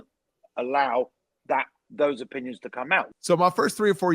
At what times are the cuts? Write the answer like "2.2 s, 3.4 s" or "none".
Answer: 3.1 s